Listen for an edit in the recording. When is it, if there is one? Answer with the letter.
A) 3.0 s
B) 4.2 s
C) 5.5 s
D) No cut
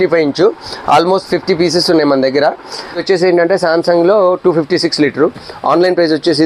A